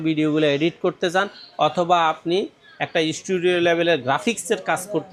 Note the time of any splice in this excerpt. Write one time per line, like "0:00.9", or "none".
none